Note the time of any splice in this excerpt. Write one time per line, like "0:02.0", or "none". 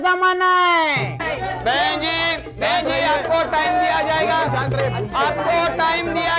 0:01.2